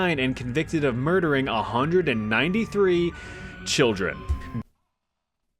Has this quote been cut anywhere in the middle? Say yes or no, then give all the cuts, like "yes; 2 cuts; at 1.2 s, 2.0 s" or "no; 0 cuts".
no; 0 cuts